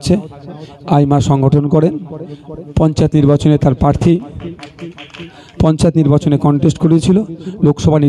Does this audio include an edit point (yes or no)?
no